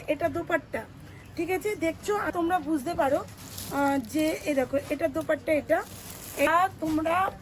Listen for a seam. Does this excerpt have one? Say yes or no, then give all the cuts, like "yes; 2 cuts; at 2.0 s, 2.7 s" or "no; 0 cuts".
yes; 2 cuts; at 2.3 s, 6.5 s